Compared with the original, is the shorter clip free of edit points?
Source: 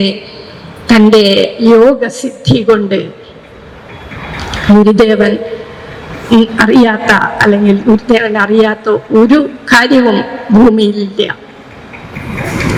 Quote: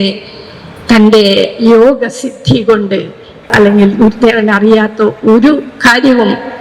no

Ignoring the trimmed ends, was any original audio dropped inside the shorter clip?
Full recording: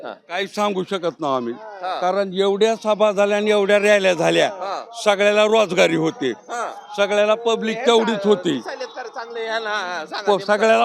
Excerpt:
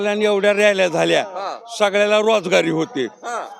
no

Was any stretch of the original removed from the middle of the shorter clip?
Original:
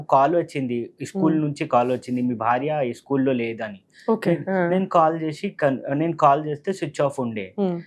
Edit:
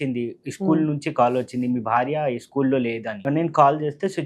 yes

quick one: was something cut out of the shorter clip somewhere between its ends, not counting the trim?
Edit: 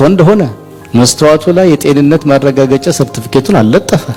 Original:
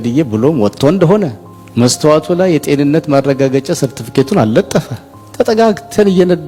no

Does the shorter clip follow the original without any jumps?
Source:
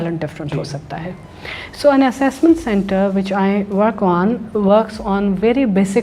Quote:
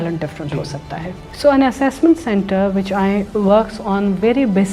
no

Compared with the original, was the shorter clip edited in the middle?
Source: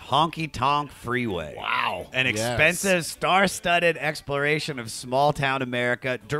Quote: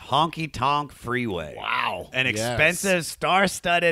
no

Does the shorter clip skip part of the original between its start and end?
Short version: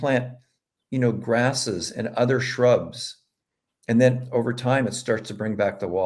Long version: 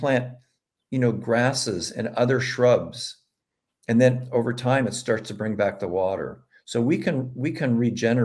no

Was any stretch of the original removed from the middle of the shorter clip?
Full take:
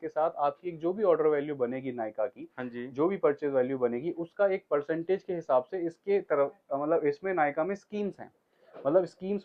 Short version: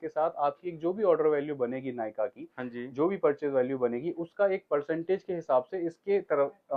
no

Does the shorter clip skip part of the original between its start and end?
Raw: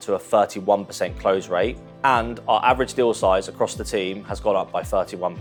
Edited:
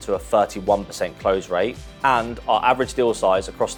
no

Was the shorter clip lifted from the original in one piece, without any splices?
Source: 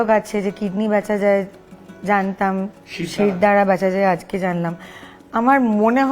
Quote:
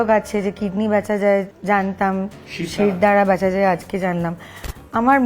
no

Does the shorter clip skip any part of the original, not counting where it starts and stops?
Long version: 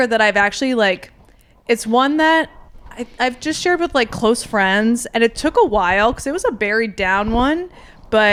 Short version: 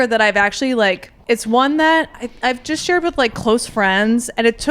yes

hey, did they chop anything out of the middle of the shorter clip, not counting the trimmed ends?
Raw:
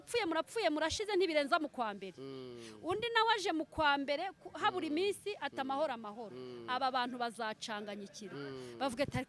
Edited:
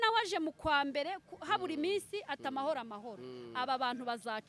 no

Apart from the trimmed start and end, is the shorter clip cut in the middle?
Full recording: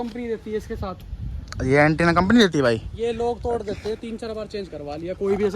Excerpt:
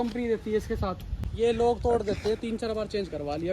yes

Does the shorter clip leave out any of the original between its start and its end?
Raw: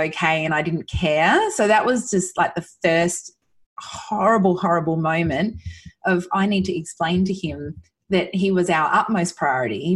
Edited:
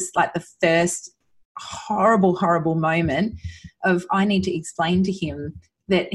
no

